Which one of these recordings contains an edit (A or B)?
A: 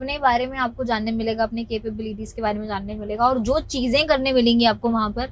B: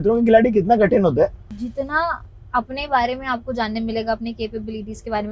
B